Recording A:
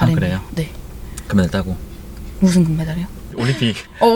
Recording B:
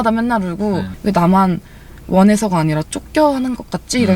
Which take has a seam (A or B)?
B